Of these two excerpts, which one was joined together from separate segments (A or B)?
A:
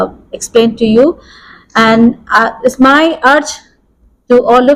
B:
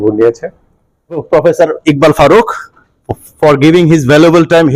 B